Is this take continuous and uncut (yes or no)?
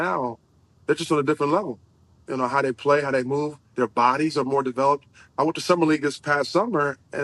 yes